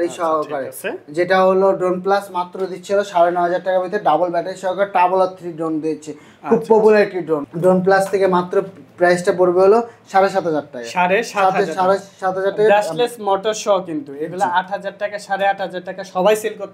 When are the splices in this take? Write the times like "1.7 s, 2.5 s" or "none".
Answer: 7.5 s